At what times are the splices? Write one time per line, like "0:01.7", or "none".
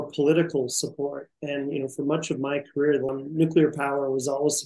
0:03.1